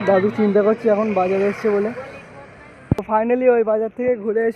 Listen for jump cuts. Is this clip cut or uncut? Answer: uncut